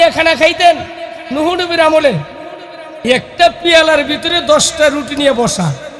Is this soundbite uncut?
yes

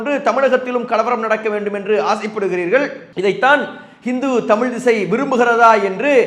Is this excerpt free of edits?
yes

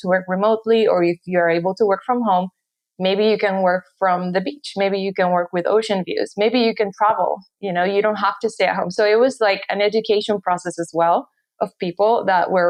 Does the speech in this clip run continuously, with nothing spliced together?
yes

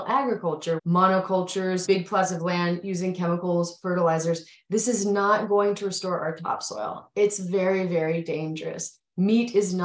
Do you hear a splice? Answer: yes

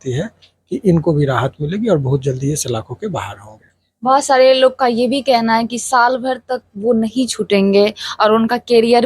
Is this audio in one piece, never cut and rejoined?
yes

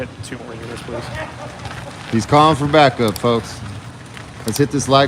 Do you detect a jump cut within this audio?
no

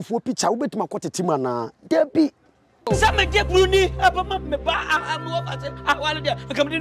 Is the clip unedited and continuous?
yes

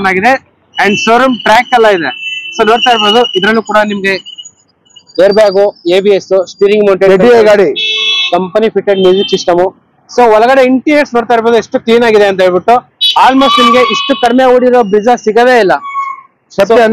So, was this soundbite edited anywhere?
no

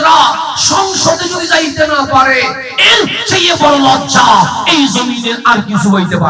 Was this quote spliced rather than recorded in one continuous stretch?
no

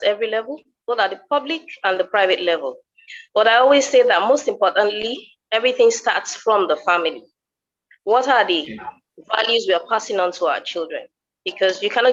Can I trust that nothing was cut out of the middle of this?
yes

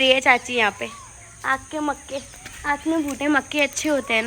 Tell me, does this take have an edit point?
no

